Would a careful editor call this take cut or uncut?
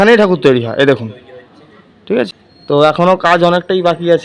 cut